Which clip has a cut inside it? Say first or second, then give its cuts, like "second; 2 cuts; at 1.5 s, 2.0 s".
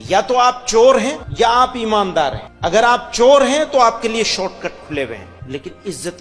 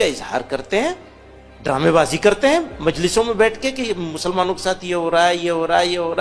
first; 3 cuts; at 1.2 s, 2.5 s, 5.3 s